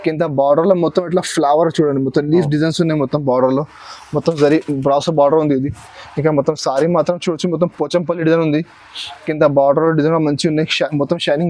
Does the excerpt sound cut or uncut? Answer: uncut